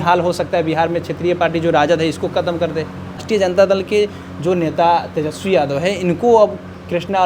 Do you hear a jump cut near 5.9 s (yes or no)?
no